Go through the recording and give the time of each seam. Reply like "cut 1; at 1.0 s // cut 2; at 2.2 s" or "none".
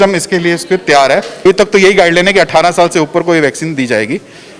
cut 1; at 1.4 s